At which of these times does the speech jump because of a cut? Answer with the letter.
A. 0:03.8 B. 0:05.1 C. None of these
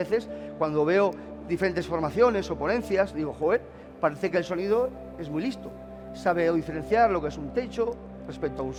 C